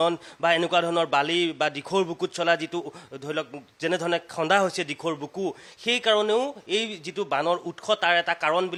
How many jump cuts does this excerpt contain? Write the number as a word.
zero